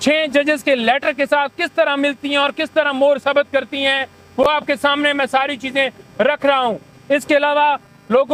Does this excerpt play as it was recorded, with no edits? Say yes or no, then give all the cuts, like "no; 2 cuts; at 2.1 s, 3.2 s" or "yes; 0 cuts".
yes; 0 cuts